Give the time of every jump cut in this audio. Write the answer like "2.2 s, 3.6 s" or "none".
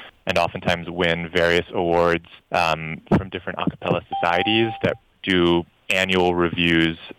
2.3 s